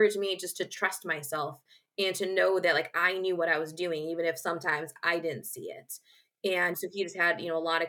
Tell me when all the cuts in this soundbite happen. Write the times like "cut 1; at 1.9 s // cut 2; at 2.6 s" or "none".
cut 1; at 6.7 s